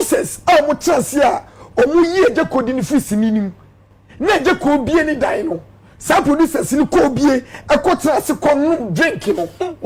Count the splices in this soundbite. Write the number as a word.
zero